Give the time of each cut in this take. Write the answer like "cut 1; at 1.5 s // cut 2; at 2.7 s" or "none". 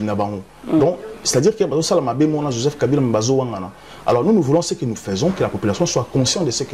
none